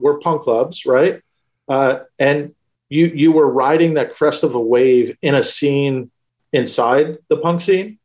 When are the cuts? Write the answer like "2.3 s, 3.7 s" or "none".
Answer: none